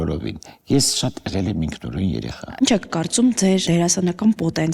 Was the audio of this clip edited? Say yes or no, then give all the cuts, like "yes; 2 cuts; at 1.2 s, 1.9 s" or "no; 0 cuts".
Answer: yes; 2 cuts; at 2.4 s, 3.6 s